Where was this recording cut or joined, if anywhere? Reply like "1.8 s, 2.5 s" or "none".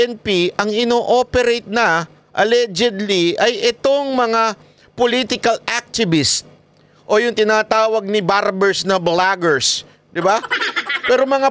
none